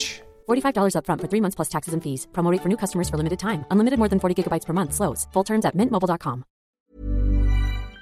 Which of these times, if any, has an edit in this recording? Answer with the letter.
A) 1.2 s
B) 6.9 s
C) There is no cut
B